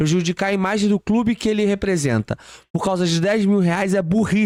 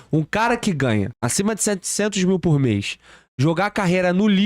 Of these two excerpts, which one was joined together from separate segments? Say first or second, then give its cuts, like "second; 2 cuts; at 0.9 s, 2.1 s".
second; 1 cut; at 1.2 s